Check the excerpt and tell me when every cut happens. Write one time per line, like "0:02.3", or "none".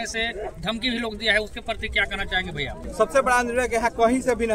0:02.8